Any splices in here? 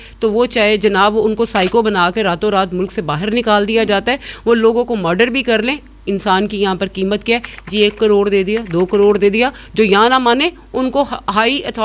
no; 0 cuts

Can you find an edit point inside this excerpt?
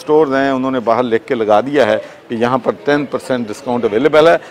no; 0 cuts

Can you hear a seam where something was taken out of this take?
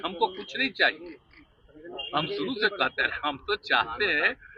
no; 0 cuts

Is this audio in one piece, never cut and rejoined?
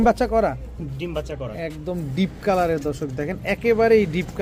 yes; 0 cuts

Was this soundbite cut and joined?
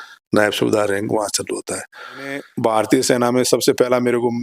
yes; 1 cut; at 2.5 s

